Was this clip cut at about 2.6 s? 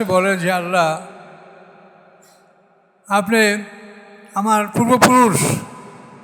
no; 0 cuts

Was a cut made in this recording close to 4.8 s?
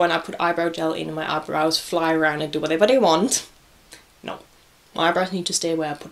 no; 0 cuts

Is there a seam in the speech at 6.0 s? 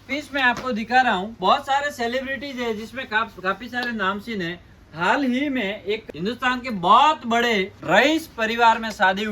yes; 2 cuts; at 1.3 s, 6.0 s

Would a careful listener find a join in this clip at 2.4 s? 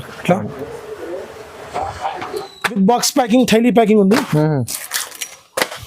yes; 1 cut; at 2.4 s

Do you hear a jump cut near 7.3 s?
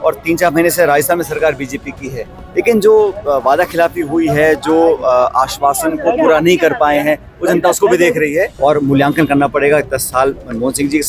no; 1 cut; at 8.5 s

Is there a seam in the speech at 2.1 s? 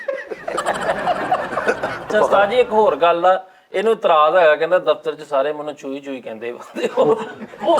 yes; 1 cut; at 2.1 s

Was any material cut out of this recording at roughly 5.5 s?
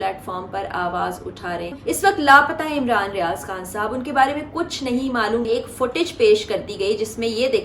yes; 2 cuts; at 1.7 s, 5.5 s

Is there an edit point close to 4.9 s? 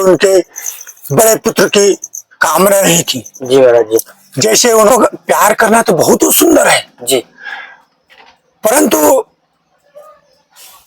yes; 1 cut; at 4.9 s

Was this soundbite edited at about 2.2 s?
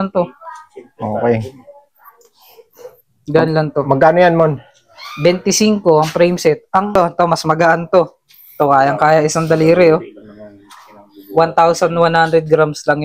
no; 1 cut; at 6.9 s

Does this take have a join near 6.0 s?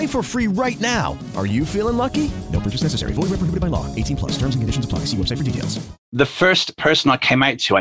yes; 1 cut; at 6.0 s

